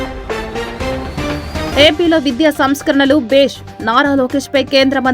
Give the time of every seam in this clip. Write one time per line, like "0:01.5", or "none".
0:01.7